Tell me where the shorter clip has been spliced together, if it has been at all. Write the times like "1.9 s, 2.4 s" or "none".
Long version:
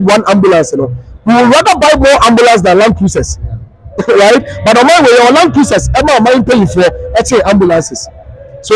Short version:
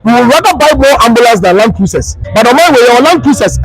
2.2 s